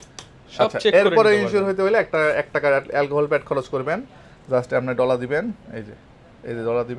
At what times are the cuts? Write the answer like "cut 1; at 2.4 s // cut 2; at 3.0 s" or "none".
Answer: none